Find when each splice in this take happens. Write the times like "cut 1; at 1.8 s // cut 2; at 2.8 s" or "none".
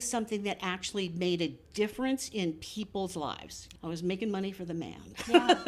cut 1; at 3.6 s